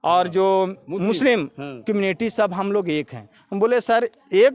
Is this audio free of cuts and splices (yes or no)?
yes